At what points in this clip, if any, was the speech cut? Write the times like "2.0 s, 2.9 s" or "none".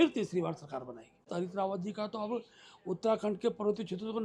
1.3 s